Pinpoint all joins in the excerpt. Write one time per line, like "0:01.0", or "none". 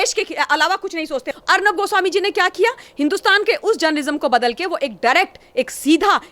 0:01.3